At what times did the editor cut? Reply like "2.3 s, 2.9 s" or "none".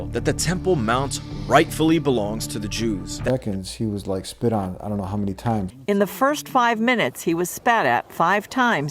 3.2 s, 5.7 s

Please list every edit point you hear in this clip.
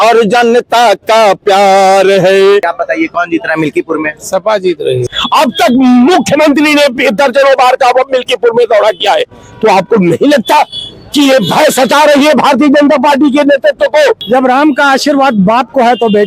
2.7 s, 5.1 s, 14.2 s

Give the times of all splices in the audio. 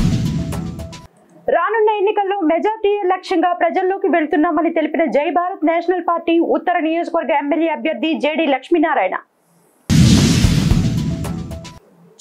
0.9 s

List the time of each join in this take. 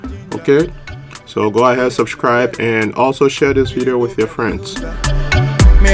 5.0 s

